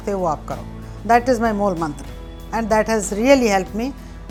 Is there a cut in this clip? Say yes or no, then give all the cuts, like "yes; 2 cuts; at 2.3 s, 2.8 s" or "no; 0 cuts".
no; 0 cuts